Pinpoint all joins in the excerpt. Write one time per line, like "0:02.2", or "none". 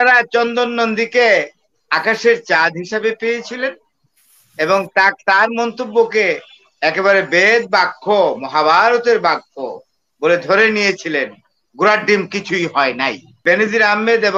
0:13.4